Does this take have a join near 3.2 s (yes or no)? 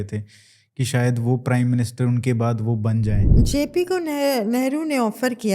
yes